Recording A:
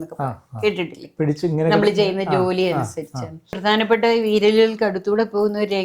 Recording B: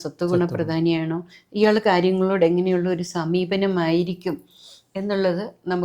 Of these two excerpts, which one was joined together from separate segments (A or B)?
A